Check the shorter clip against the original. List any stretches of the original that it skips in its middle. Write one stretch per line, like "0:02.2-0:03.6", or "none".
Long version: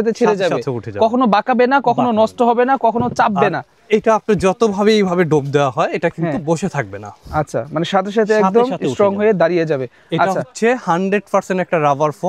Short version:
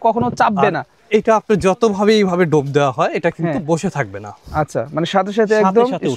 none